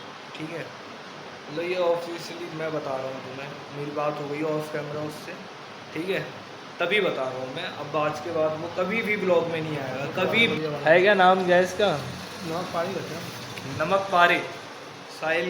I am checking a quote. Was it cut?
yes; 1 cut; at 10.5 s

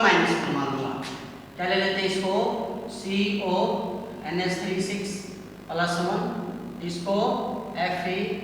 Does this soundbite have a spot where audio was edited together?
no; 0 cuts

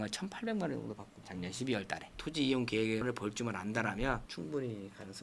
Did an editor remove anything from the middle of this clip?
yes; 2 cuts; at 2.1 s, 4.3 s

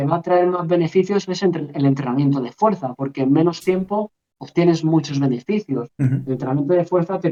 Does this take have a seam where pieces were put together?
no; 0 cuts

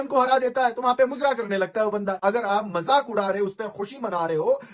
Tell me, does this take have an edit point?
yes; 1 cut; at 2.2 s

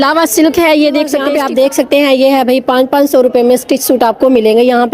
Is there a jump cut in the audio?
yes; 1 cut; at 1.2 s

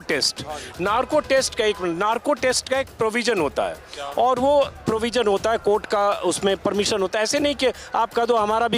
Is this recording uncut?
yes; 0 cuts

